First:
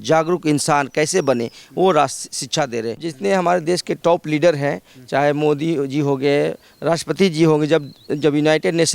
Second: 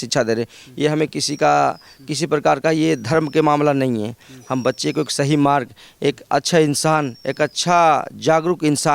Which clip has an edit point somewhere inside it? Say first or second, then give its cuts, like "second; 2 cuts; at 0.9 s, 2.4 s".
first; 1 cut; at 3.0 s